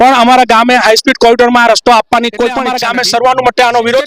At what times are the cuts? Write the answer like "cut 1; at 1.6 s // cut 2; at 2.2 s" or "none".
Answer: cut 1; at 2.7 s